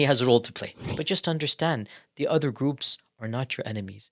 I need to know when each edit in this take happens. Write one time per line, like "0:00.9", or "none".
0:00.9